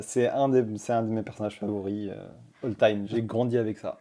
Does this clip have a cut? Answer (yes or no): yes